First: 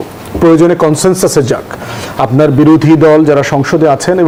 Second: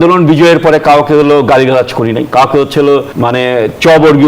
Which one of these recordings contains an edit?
second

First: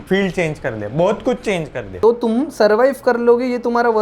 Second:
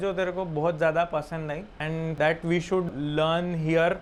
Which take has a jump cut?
first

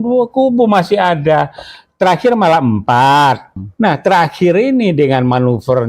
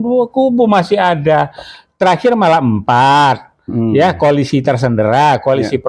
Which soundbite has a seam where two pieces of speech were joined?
first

